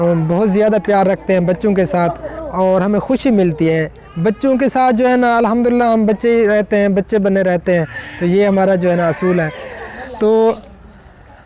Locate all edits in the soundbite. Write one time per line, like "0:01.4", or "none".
none